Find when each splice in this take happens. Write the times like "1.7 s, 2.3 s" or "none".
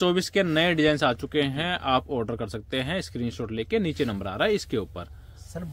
none